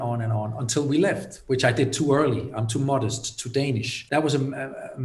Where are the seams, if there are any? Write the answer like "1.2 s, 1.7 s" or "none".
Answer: 3.9 s